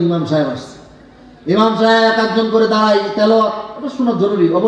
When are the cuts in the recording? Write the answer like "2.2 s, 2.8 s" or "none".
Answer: none